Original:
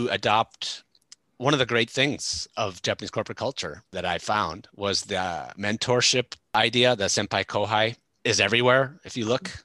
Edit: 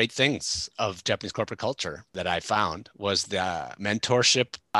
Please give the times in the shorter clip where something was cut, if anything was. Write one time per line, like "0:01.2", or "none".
none